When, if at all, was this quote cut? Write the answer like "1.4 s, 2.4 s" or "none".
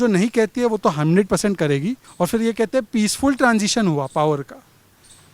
2.0 s